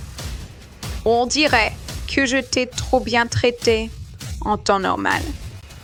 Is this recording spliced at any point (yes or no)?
no